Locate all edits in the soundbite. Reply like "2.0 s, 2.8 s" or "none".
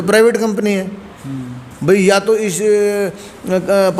none